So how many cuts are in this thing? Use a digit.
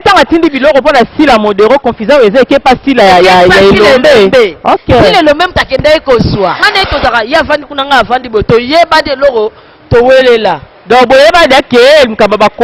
1